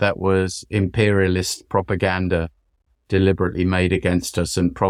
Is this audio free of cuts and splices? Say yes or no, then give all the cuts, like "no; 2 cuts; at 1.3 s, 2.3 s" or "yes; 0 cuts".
yes; 0 cuts